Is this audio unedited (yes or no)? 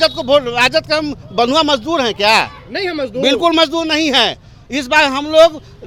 yes